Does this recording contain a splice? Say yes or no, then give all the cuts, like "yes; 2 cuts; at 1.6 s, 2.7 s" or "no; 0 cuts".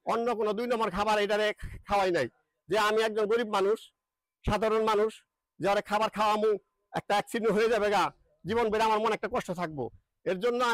no; 0 cuts